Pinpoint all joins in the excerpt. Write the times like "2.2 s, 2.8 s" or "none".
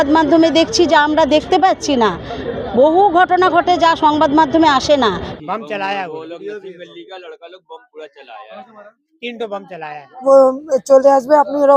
5.3 s, 10.2 s